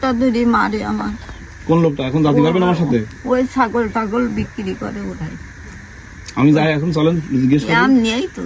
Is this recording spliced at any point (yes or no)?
no